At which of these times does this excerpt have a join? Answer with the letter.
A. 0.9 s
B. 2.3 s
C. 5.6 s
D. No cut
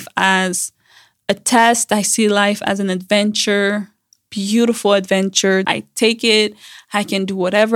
C